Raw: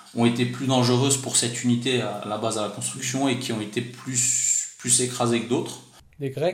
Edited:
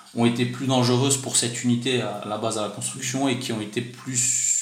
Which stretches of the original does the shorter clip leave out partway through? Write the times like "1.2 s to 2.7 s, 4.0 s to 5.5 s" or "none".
none